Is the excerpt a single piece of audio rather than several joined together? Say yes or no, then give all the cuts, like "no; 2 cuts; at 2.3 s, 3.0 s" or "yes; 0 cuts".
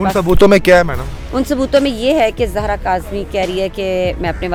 yes; 0 cuts